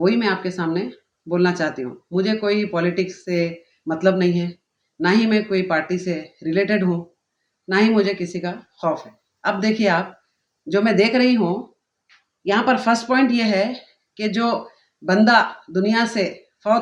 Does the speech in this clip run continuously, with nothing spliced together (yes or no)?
yes